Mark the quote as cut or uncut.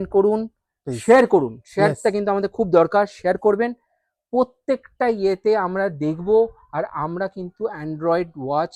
uncut